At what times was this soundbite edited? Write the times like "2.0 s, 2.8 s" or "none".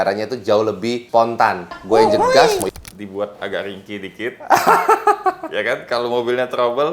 2.7 s